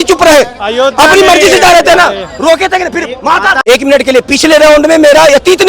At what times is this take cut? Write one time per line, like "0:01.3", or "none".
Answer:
0:03.6